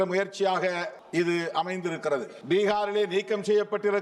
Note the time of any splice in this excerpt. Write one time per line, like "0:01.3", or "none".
0:01.0
0:02.3

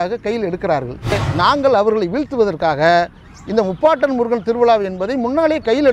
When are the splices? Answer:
0:01.1

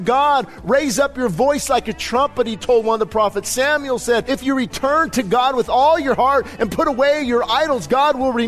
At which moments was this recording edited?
0:04.3

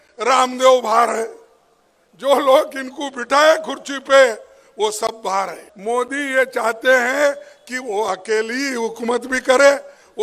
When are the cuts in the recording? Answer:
0:05.7

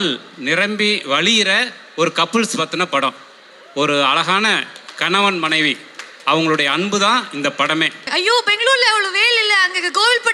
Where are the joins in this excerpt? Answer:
0:08.1

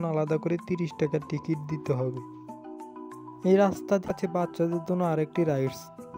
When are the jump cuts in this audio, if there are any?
0:04.1

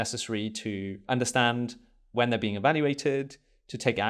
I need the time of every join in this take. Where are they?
0:01.0

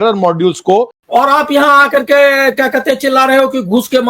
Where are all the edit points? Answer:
0:00.9

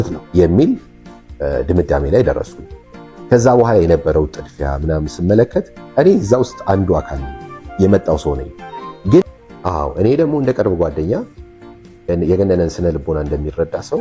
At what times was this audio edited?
0:09.2

